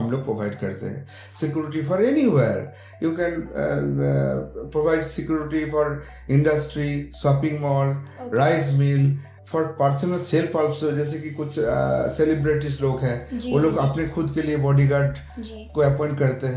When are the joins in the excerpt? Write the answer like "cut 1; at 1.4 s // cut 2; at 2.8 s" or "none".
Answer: none